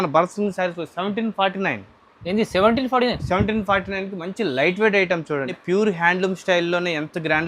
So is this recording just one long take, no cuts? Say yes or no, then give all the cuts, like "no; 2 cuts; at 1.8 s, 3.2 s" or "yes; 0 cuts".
no; 1 cut; at 5.5 s